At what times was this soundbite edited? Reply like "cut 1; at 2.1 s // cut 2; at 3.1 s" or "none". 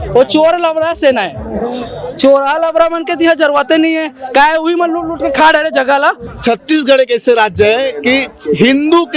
cut 1; at 6.2 s